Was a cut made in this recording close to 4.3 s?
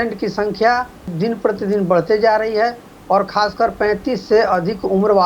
no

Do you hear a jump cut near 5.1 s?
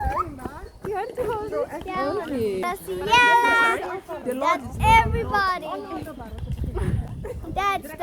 no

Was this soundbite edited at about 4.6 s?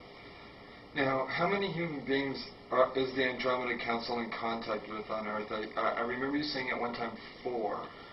yes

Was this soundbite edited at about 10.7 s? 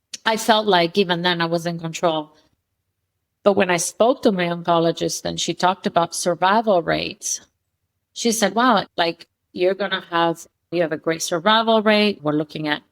yes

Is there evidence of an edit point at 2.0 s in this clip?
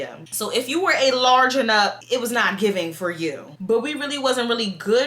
yes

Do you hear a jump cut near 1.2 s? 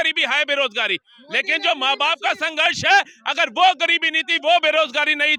no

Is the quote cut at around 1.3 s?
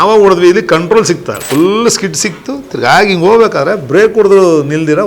yes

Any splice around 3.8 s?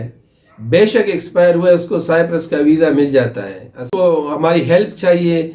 yes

